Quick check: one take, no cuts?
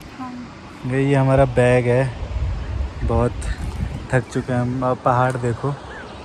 yes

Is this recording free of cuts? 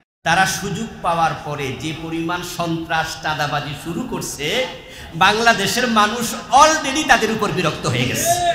yes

